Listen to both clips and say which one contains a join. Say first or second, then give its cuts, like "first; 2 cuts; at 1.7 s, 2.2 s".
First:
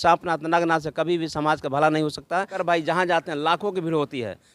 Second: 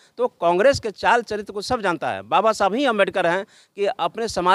first; 1 cut; at 2.5 s